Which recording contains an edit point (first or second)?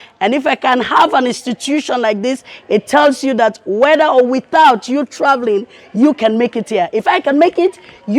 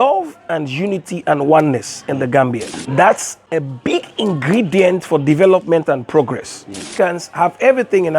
second